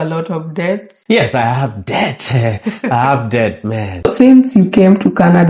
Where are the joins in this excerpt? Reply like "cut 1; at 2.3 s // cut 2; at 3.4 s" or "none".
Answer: cut 1; at 0.9 s // cut 2; at 4.0 s